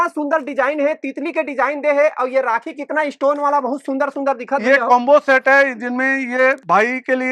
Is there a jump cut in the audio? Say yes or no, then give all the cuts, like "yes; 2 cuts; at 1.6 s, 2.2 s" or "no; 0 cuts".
no; 0 cuts